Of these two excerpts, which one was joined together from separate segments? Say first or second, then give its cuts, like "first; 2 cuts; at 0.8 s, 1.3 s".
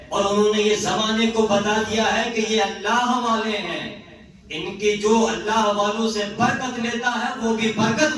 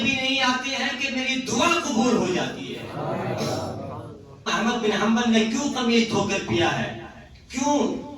second; 1 cut; at 4.4 s